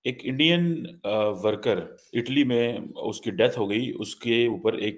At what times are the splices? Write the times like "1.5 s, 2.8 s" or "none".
2.0 s